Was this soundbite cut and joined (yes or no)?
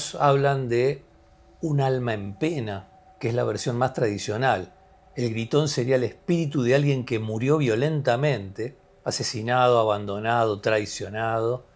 no